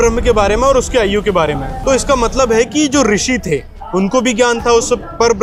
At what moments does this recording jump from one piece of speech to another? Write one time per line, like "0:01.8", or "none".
none